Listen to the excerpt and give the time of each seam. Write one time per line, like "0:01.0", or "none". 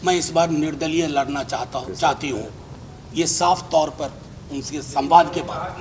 none